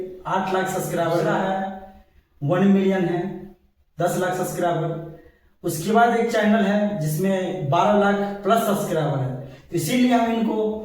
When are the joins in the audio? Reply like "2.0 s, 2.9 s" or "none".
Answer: 1.4 s